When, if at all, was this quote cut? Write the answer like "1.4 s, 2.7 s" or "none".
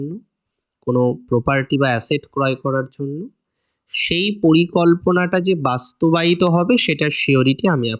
none